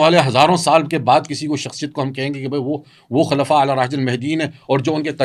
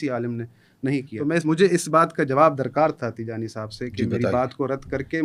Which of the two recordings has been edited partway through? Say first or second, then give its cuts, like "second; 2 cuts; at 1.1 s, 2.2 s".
second; 1 cut; at 1.1 s